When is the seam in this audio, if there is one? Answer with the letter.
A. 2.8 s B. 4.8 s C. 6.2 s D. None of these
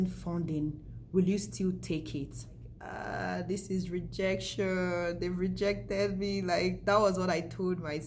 A